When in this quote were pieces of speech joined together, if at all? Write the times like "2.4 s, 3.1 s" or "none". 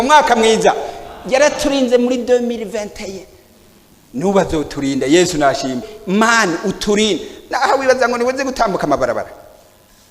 5.9 s